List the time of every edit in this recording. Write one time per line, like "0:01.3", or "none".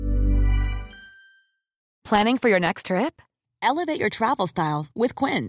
0:02.0